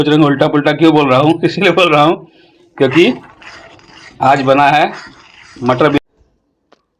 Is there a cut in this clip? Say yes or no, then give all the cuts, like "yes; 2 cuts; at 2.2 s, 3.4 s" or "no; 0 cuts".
yes; 1 cut; at 6.0 s